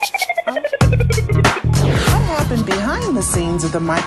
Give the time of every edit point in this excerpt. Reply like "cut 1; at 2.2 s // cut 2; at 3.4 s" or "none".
cut 1; at 1.3 s